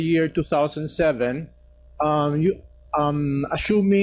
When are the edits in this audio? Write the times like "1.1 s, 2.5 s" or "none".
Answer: none